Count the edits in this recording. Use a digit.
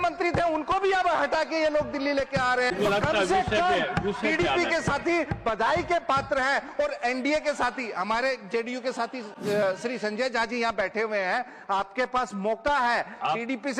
1